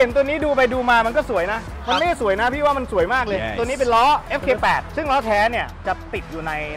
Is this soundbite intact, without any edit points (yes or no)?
yes